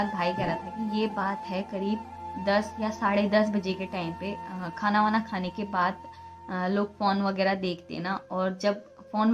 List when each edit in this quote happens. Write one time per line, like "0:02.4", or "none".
none